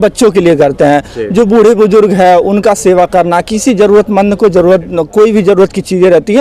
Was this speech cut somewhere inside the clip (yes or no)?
no